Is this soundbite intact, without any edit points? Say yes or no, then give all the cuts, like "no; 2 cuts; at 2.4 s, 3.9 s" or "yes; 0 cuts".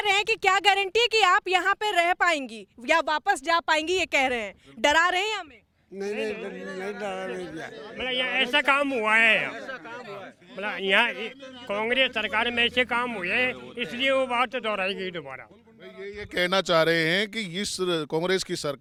yes; 0 cuts